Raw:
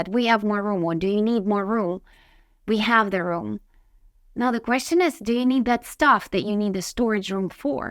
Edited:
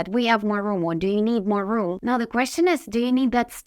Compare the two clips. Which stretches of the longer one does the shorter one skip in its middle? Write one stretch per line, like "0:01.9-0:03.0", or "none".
0:02.0-0:04.3